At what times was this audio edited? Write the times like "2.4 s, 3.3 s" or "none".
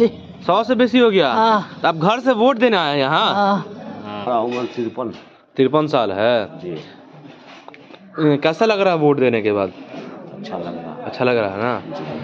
3.5 s